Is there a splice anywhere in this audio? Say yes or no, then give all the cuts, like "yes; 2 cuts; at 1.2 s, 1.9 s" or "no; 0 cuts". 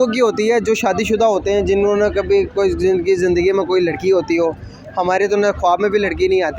no; 0 cuts